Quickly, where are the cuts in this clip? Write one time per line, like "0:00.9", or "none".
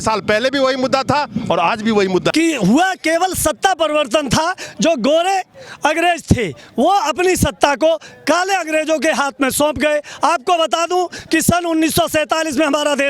0:02.3